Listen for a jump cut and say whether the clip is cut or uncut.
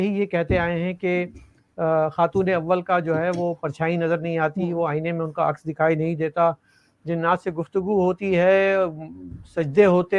uncut